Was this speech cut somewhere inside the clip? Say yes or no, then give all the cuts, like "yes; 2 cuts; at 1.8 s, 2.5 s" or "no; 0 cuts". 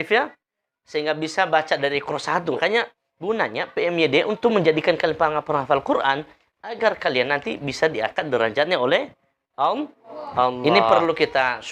yes; 2 cuts; at 2.6 s, 10.6 s